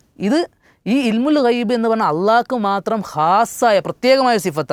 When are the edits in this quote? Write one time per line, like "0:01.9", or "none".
none